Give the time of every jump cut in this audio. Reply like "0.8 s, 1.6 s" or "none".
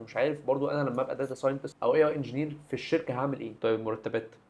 1.7 s, 3.5 s